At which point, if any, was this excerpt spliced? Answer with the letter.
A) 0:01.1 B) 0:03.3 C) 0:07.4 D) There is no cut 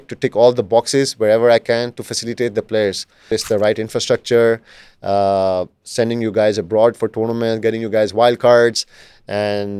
B